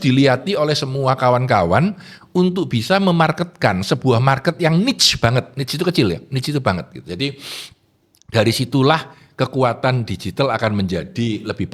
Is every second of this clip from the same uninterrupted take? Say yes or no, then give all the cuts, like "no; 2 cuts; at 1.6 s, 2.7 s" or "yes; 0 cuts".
yes; 0 cuts